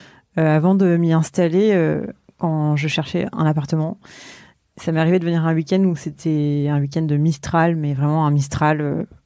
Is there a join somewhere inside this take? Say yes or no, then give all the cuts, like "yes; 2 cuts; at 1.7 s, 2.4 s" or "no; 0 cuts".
no; 0 cuts